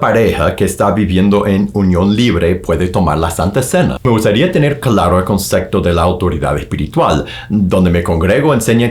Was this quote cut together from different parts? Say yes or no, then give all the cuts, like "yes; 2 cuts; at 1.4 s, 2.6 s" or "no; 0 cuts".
yes; 1 cut; at 4.0 s